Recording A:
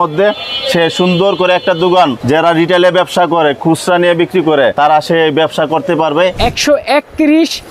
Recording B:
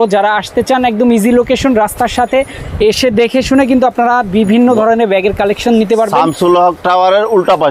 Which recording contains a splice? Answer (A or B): A